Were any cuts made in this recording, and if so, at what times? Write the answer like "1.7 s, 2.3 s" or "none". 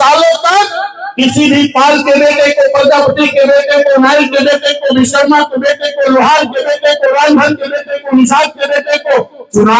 none